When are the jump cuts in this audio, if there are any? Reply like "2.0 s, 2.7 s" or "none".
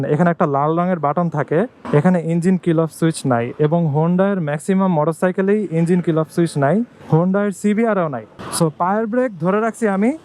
8.3 s